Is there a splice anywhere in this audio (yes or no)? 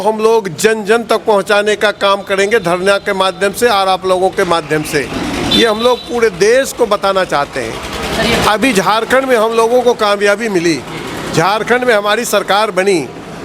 no